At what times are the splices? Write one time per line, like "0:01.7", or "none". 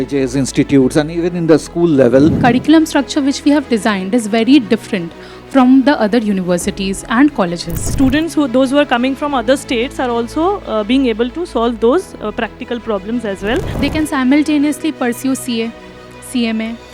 0:02.4
0:07.9
0:13.7